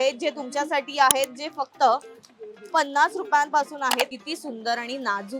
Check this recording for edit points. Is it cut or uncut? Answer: cut